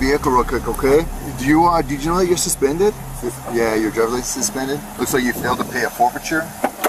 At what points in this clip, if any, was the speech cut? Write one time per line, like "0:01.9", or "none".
none